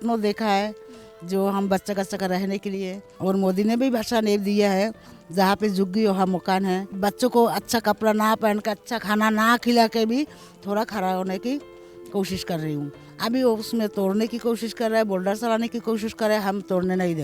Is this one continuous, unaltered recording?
no; 2 cuts; at 3.1 s, 6.9 s

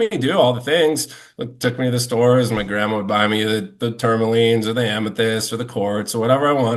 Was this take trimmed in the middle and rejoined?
no; 0 cuts

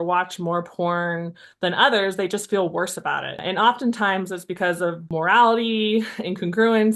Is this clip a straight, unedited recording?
no; 2 cuts; at 3.4 s, 5.0 s

